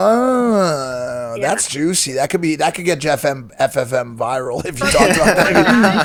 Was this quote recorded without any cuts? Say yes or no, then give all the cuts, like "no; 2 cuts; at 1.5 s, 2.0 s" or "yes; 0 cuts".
yes; 0 cuts